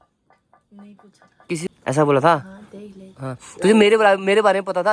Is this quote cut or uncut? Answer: cut